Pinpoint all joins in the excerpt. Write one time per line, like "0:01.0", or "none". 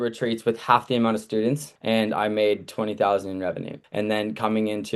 0:01.7
0:03.8